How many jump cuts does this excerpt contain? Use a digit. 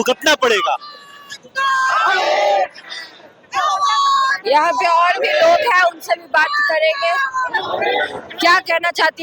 0